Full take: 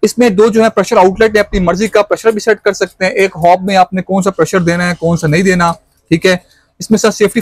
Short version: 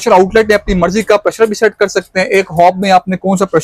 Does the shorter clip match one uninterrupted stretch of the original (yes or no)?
yes